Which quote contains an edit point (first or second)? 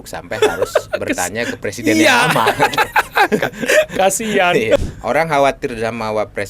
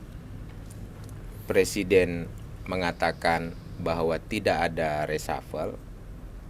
first